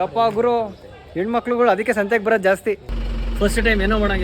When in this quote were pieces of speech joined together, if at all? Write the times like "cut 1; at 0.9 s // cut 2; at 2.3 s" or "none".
cut 1; at 2.9 s